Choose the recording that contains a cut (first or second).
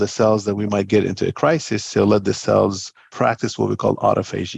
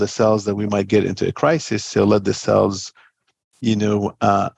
first